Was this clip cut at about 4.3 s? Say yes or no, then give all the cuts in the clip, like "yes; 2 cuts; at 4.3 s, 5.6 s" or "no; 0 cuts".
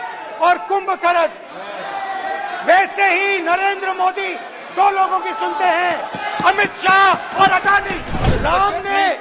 no; 1 cut; at 8.3 s